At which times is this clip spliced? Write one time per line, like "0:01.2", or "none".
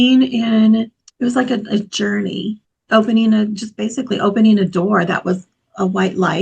0:01.0
0:02.7